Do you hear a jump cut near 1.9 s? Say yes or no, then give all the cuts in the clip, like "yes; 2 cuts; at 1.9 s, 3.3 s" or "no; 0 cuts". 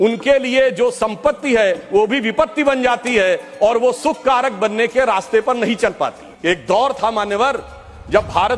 no; 1 cut; at 6.3 s